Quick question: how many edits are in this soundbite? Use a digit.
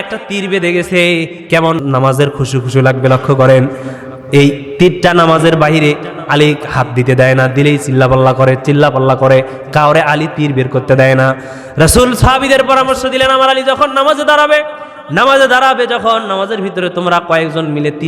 1